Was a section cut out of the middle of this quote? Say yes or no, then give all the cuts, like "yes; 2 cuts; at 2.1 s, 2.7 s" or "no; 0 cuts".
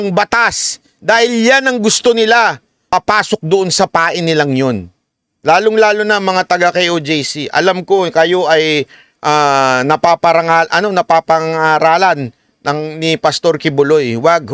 yes; 1 cut; at 2.9 s